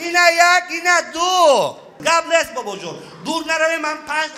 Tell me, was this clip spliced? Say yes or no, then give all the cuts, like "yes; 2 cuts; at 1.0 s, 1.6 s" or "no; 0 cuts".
yes; 1 cut; at 1.9 s